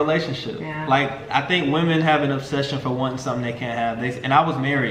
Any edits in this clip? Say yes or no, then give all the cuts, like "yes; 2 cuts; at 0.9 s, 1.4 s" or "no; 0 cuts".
no; 0 cuts